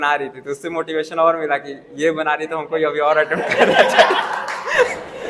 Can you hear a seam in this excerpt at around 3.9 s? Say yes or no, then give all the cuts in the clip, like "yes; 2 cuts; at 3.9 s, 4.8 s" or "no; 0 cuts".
no; 0 cuts